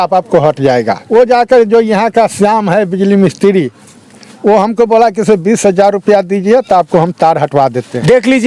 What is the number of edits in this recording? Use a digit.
1